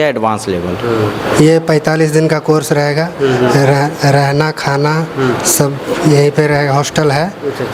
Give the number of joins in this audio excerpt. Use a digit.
1